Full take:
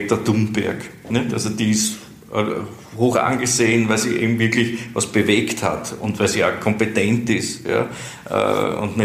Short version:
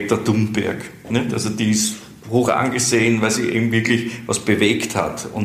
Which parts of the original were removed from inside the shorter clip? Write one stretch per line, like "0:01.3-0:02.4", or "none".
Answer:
0:02.1-0:02.8